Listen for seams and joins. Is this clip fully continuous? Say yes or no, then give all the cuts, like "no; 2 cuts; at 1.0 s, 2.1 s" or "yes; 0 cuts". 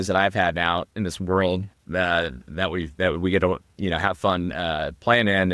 no; 1 cut; at 0.9 s